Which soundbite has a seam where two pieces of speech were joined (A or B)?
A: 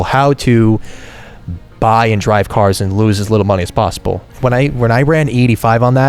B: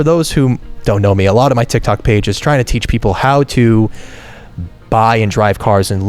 A